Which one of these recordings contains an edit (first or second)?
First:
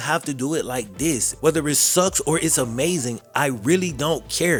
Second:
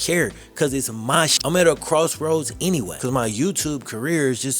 second